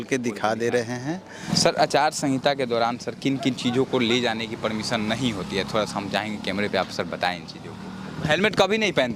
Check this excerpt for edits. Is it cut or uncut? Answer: cut